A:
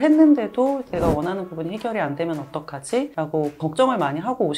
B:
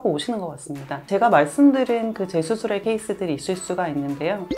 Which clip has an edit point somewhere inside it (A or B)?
B